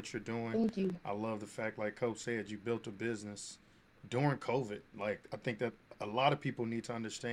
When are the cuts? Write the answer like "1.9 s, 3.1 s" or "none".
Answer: none